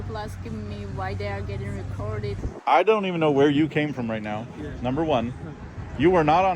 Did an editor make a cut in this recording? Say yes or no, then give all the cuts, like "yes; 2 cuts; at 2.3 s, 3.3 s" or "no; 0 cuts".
yes; 1 cut; at 2.4 s